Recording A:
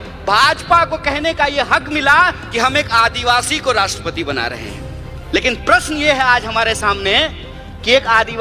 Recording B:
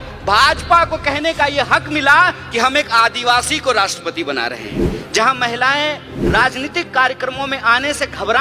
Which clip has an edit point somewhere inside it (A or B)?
B